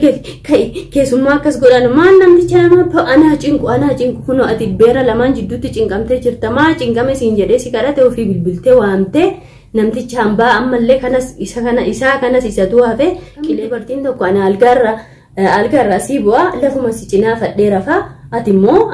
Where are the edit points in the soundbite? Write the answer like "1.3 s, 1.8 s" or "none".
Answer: 13.6 s

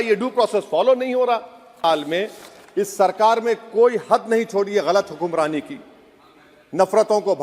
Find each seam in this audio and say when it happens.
1.8 s

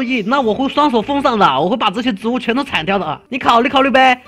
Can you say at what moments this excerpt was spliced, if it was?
3.2 s

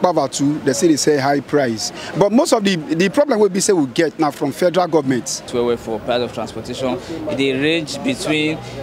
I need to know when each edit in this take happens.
5.5 s

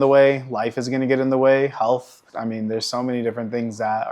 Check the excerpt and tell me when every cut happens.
2.2 s

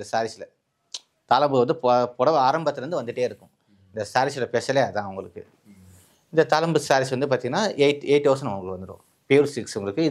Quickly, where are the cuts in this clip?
none

